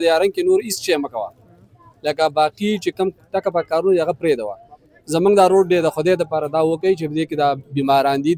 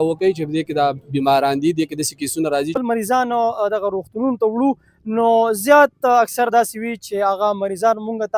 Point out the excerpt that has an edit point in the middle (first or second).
second